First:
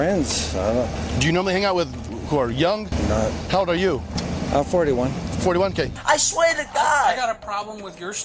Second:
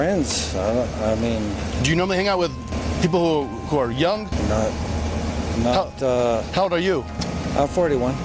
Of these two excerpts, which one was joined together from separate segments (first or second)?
first